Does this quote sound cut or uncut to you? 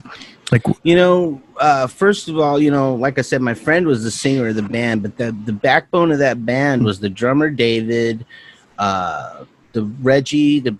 uncut